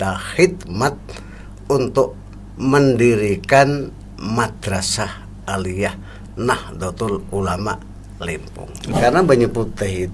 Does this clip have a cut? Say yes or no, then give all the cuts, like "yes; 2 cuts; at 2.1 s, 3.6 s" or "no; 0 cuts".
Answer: yes; 1 cut; at 8.7 s